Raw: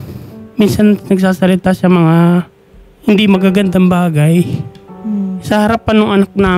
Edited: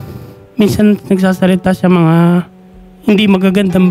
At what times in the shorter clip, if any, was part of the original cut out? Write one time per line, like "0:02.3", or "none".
none